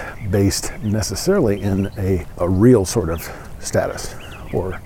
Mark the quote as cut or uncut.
cut